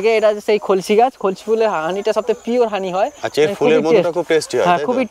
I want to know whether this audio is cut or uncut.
uncut